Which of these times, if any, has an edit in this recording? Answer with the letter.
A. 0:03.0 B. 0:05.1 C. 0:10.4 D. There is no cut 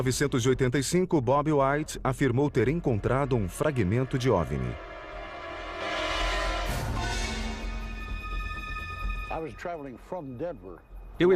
A